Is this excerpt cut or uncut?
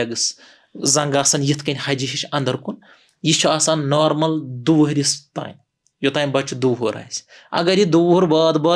uncut